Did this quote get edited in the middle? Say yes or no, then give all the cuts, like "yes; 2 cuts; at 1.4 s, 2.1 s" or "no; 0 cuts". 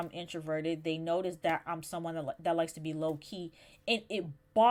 no; 0 cuts